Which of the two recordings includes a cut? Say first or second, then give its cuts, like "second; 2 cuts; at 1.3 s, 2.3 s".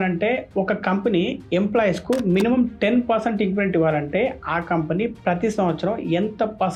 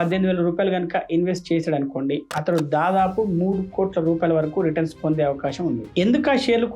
second; 1 cut; at 5.9 s